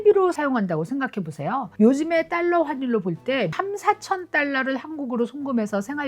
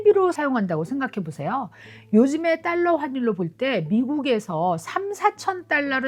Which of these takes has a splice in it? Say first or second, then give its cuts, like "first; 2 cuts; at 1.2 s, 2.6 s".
first; 2 cuts; at 1.7 s, 3.5 s